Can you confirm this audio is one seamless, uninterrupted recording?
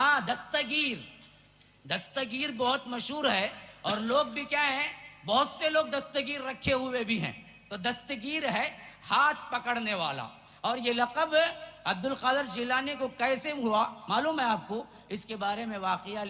yes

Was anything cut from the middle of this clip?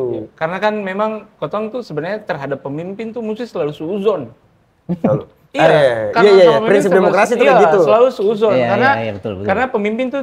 no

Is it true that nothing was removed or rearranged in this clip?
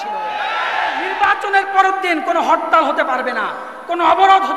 no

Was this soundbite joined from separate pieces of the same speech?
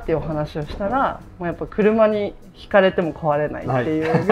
no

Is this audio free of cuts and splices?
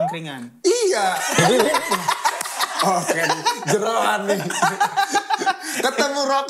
yes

